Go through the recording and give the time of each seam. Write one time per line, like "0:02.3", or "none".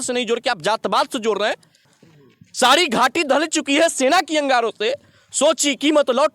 0:01.9